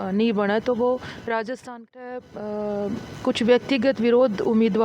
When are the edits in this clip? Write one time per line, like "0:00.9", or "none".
0:01.7